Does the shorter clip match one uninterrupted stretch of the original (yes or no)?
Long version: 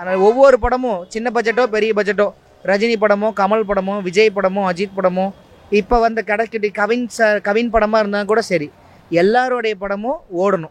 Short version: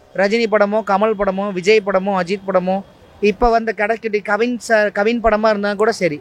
yes